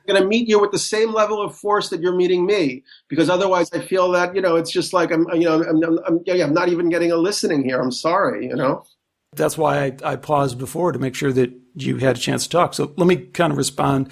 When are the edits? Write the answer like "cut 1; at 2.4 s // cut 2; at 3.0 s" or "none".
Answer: cut 1; at 9.3 s